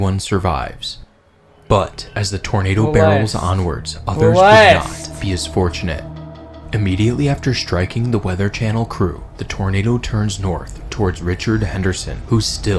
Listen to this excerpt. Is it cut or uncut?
uncut